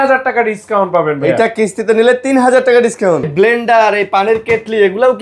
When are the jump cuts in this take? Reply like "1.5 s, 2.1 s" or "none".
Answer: 3.3 s